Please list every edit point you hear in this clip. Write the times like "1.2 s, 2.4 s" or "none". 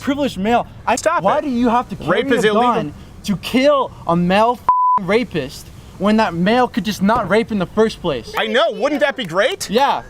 0.9 s